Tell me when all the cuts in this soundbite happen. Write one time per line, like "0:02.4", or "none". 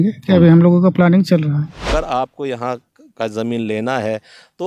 0:01.9